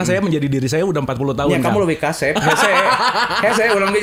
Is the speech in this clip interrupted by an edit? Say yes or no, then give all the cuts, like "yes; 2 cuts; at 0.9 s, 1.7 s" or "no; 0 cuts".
no; 0 cuts